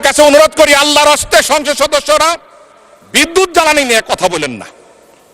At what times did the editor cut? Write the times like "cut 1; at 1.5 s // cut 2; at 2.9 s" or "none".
none